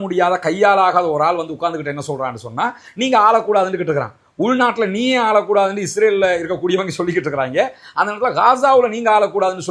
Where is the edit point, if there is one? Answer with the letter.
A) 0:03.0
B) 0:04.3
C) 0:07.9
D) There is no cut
D